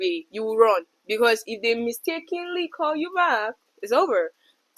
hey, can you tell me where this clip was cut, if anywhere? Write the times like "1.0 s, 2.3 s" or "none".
none